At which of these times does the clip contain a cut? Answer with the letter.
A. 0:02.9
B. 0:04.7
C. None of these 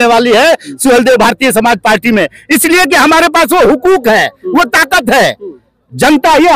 C